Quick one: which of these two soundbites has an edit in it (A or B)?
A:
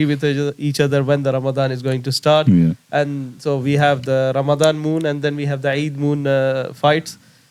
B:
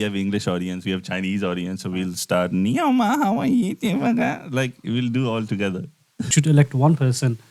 B